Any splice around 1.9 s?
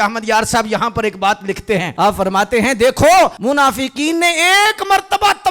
yes; 2 cuts; at 1.9 s, 3.4 s

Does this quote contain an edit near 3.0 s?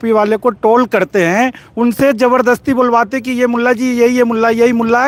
no; 0 cuts

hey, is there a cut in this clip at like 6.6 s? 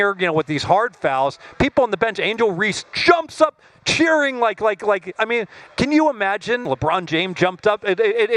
yes; 1 cut; at 6.6 s

